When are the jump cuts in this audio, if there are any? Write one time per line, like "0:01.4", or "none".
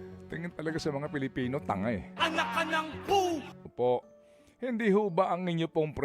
0:03.6

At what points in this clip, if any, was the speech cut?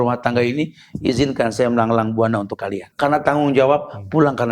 0:02.8

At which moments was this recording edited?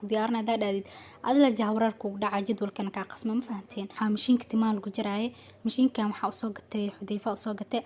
0:04.0

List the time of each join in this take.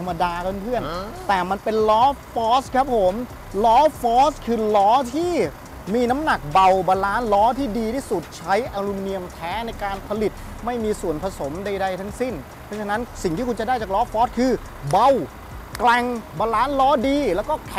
none

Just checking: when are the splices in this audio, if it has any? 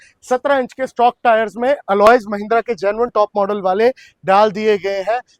none

